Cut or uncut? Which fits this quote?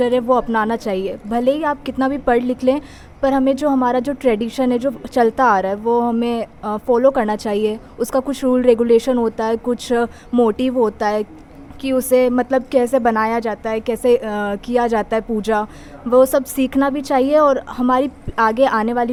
uncut